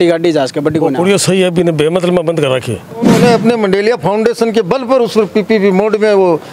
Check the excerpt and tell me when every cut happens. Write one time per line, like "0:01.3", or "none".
0:03.1